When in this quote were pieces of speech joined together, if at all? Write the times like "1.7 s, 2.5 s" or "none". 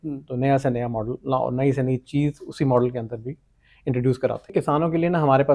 4.5 s